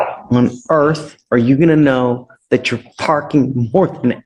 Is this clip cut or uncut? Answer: uncut